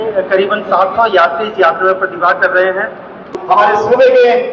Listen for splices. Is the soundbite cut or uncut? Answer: cut